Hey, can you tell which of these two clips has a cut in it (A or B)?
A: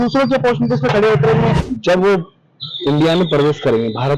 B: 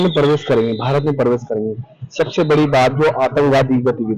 A